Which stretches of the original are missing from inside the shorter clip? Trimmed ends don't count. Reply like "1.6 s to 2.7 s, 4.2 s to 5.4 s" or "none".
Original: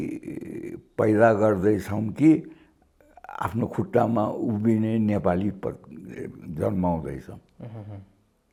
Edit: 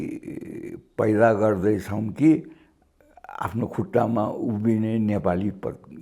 none